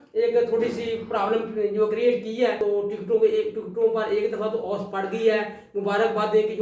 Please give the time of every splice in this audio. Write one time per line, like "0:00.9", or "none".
0:02.6